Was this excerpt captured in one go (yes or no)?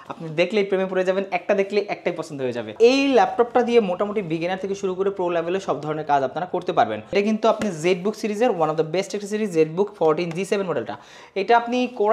no